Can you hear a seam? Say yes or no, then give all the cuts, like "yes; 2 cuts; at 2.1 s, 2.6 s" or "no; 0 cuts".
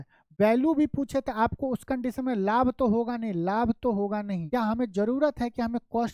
yes; 1 cut; at 4.4 s